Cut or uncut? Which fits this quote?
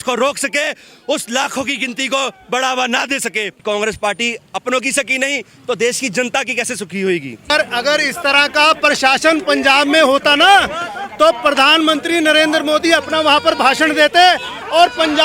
cut